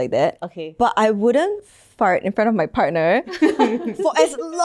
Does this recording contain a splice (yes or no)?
no